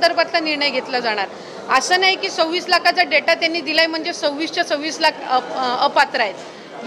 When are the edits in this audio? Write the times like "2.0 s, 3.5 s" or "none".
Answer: none